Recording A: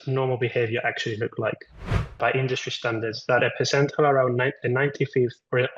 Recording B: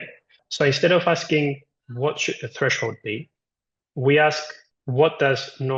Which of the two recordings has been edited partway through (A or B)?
A